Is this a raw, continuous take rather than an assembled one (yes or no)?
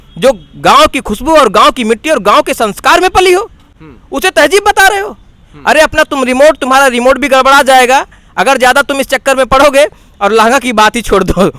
yes